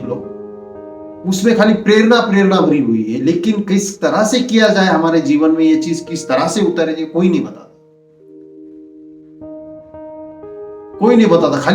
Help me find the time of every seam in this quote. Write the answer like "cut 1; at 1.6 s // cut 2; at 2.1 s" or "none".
cut 1; at 7.6 s // cut 2; at 9.3 s // cut 3; at 10.9 s